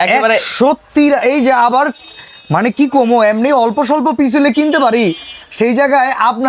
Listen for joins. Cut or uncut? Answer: uncut